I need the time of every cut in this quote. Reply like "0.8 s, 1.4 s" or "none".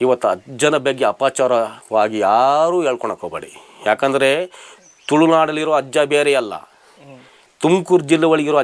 none